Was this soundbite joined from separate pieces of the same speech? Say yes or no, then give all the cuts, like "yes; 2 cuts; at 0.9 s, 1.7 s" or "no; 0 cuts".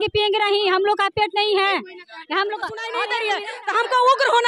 yes; 1 cut; at 3.1 s